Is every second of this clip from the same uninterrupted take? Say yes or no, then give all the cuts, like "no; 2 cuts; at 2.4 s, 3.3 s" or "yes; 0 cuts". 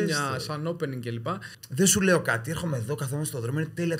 no; 1 cut; at 1.6 s